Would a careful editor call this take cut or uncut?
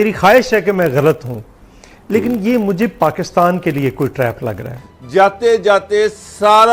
cut